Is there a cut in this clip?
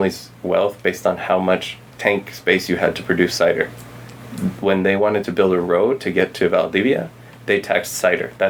no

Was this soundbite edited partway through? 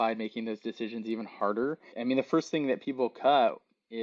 yes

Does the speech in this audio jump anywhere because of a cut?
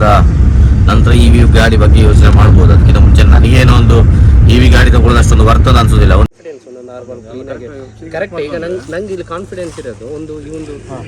yes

